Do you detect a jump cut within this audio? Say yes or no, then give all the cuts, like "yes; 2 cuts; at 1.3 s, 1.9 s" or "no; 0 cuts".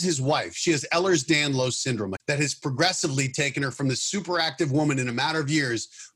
yes; 1 cut; at 2.2 s